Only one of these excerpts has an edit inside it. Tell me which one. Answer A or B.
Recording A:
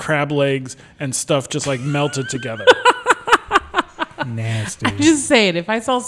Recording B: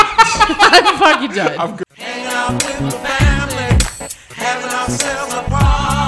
B